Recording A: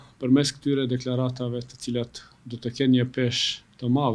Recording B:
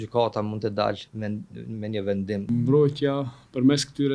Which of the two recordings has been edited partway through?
B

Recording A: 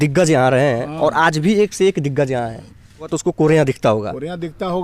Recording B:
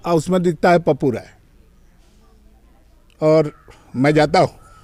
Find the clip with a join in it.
A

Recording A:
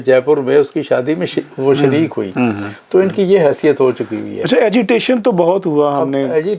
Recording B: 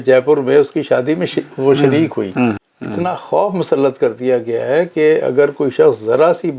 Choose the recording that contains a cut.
B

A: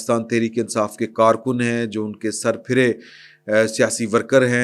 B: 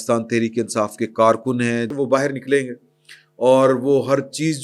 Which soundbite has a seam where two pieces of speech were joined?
B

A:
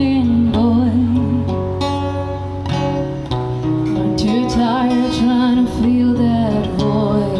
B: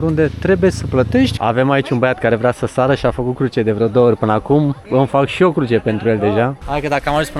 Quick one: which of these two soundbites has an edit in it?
B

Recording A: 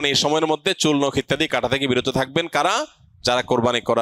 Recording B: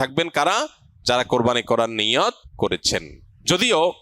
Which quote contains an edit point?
B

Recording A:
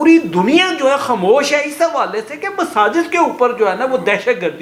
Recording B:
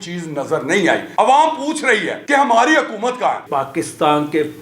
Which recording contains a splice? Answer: B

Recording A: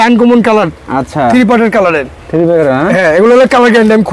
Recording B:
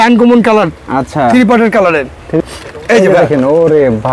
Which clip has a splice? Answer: B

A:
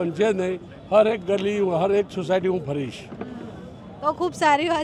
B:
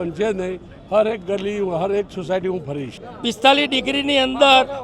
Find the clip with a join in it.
B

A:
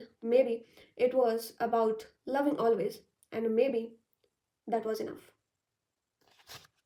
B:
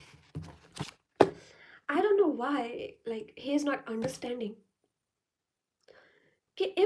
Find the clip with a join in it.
B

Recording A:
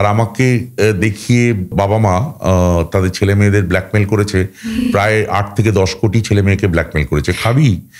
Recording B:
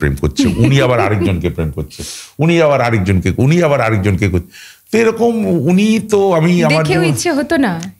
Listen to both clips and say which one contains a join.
A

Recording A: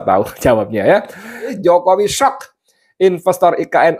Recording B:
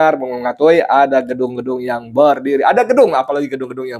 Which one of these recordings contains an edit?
A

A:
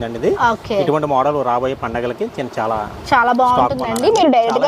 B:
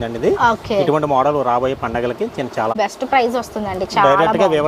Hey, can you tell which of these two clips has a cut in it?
B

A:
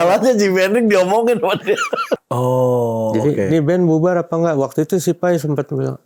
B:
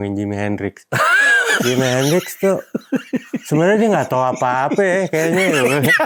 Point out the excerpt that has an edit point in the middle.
A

